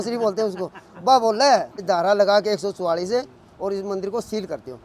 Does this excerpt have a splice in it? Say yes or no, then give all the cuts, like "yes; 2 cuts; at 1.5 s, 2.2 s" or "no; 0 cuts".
yes; 1 cut; at 1.7 s